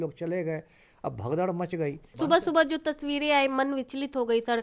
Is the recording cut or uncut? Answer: cut